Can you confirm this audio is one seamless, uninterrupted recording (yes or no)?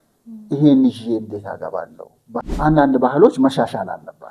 no